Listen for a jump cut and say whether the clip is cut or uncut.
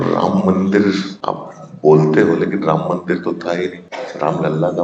cut